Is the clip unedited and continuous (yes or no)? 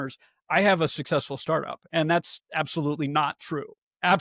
yes